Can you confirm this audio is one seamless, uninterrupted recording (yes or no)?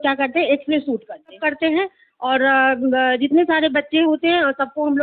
no